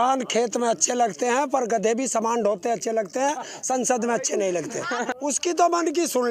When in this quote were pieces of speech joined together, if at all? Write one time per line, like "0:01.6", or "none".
0:05.1